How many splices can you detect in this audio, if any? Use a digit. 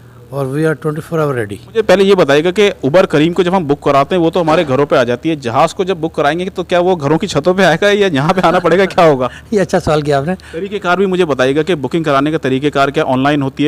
2